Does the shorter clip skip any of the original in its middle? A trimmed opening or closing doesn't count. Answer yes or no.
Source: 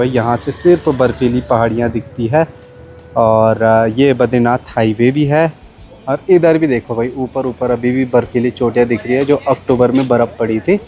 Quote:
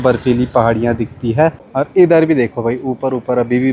yes